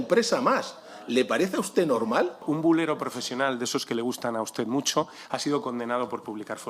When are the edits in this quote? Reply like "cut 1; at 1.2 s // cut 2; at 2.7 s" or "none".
cut 1; at 2.4 s